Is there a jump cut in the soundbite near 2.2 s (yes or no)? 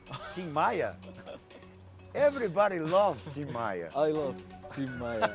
no